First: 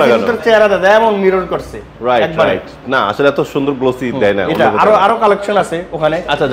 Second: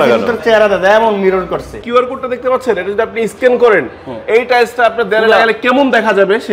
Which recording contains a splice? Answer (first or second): second